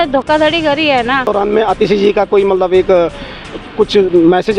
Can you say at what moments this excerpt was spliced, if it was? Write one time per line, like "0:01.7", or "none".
0:01.3